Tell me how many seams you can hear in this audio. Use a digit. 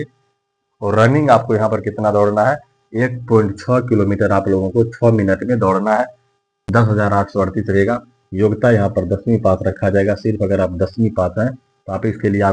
1